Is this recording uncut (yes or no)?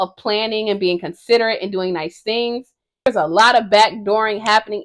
no